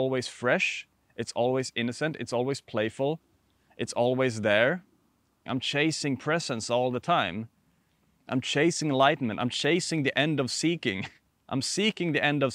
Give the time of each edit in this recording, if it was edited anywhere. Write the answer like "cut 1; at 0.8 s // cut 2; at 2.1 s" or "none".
cut 1; at 5.4 s